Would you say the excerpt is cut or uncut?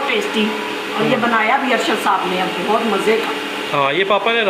uncut